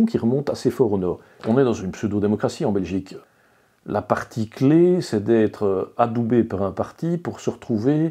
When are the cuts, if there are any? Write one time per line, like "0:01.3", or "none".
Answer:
0:01.4
0:03.2